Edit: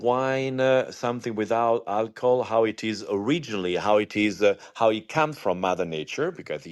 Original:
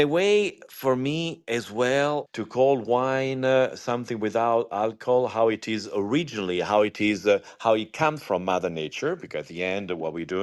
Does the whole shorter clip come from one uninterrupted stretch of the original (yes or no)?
yes